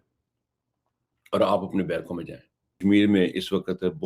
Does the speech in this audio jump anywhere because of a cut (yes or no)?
yes